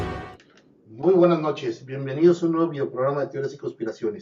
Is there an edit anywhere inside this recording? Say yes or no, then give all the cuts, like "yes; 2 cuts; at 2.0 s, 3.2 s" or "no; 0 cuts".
yes; 1 cut; at 1.8 s